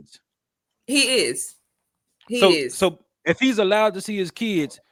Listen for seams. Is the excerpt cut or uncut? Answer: uncut